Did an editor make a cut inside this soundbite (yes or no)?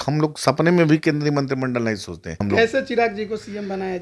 yes